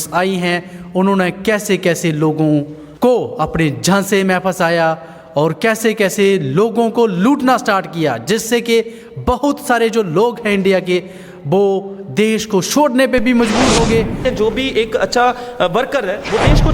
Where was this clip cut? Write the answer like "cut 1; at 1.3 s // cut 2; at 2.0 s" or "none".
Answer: cut 1; at 2.8 s // cut 2; at 14.2 s